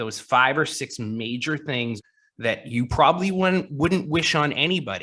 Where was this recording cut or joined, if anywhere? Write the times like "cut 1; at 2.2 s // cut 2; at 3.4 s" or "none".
cut 1; at 2.0 s